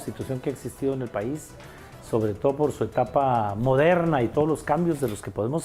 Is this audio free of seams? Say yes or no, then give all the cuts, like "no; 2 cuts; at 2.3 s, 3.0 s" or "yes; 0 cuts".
yes; 0 cuts